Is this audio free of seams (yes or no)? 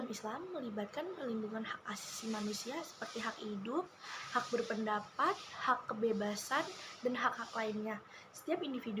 yes